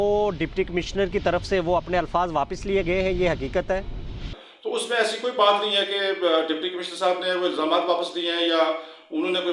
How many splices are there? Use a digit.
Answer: 1